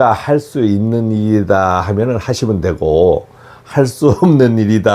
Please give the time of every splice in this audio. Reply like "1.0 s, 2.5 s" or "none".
none